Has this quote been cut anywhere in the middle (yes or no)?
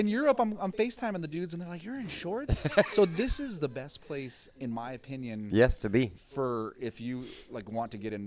no